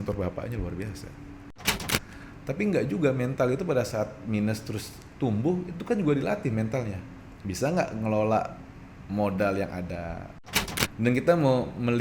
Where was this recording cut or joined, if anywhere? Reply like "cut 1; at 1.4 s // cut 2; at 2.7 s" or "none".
cut 1; at 1.8 s // cut 2; at 10.4 s